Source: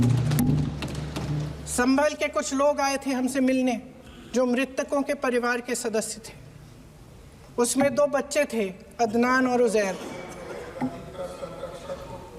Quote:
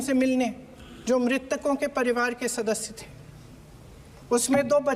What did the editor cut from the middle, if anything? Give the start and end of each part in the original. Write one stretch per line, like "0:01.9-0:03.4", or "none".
none